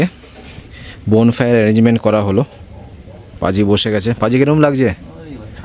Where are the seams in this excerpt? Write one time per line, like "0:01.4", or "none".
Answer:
none